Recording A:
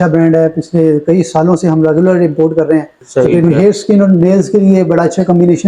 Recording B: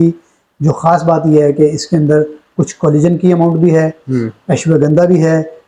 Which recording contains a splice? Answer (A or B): A